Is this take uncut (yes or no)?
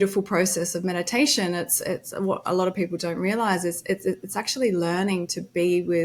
yes